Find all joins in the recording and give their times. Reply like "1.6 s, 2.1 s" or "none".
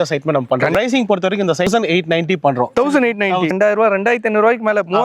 0.7 s, 1.7 s, 3.5 s